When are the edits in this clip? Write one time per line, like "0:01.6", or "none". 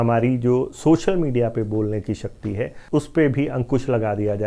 0:02.8